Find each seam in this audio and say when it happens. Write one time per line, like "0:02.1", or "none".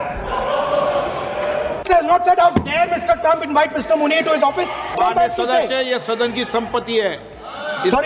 0:01.8
0:04.9